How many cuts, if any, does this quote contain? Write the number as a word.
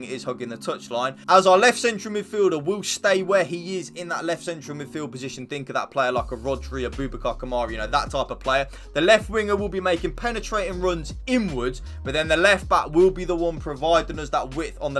one